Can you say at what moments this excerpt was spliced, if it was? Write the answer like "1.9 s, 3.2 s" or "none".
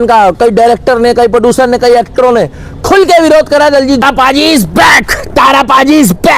4.0 s